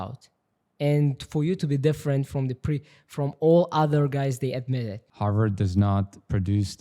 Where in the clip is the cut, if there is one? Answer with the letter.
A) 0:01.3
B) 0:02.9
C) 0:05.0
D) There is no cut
C